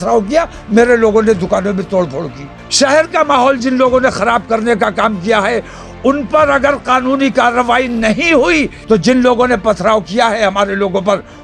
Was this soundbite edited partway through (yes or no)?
yes